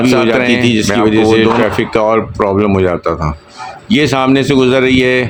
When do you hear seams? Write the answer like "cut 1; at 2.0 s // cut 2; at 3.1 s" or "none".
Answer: none